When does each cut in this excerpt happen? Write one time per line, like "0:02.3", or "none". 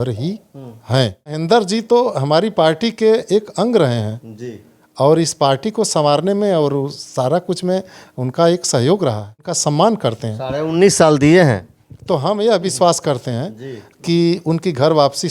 0:01.4
0:09.5

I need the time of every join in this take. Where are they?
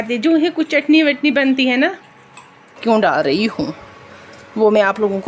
0:02.8

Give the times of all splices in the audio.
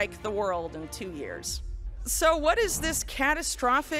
0:01.8

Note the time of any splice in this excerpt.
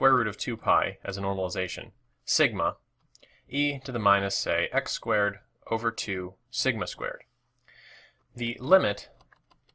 0:05.2

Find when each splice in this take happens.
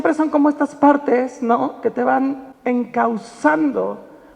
0:02.5

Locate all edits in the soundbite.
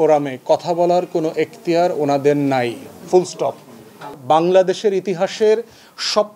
0:04.2

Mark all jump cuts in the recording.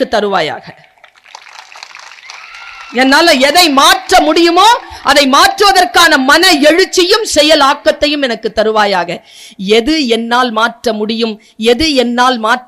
none

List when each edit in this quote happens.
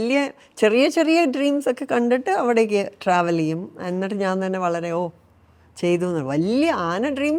none

